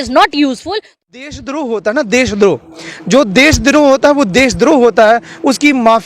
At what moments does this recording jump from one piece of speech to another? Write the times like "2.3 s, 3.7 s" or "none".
1.0 s

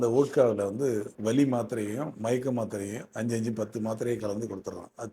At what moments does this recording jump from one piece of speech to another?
1.1 s

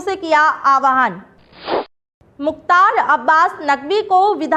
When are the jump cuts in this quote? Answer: 1.8 s

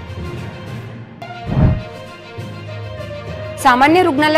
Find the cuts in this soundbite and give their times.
none

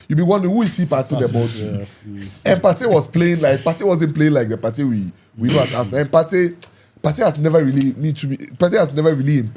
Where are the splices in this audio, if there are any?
none

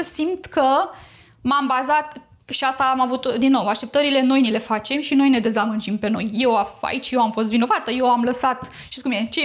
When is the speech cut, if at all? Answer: none

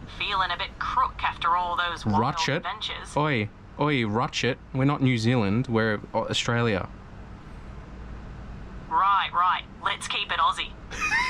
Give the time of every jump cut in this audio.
none

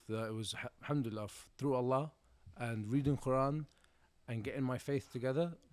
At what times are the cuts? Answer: none

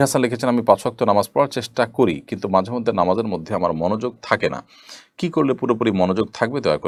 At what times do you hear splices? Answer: none

